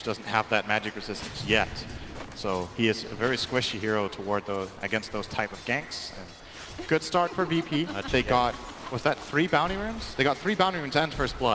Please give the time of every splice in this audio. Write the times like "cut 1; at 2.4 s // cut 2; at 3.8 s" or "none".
cut 1; at 7.8 s